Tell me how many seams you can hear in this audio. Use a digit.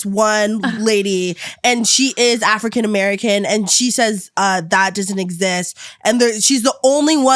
0